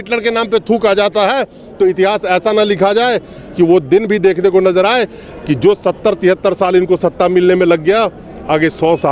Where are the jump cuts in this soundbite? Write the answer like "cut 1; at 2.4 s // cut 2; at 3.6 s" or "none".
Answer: none